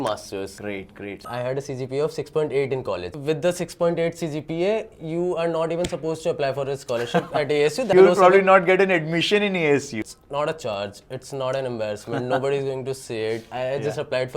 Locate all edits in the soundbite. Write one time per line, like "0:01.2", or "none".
0:01.1
0:03.1
0:07.9
0:09.9